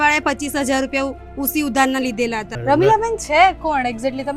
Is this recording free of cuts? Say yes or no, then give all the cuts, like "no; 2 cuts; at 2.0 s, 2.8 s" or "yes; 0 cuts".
no; 1 cut; at 2.5 s